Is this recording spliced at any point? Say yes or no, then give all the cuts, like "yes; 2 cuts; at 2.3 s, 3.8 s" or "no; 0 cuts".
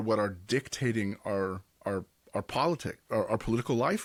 no; 0 cuts